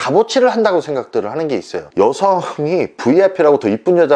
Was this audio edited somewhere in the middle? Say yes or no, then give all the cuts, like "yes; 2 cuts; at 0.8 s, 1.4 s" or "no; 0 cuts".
yes; 1 cut; at 1.8 s